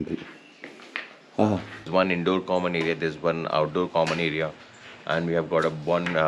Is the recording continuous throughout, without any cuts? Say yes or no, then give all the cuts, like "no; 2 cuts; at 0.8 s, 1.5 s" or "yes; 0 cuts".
no; 1 cut; at 1.9 s